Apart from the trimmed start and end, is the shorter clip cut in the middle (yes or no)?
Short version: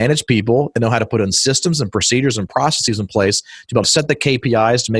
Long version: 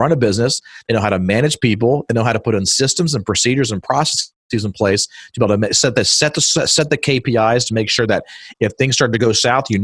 yes